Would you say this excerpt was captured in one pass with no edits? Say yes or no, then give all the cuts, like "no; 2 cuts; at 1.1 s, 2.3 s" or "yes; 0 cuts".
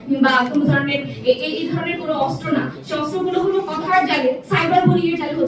yes; 0 cuts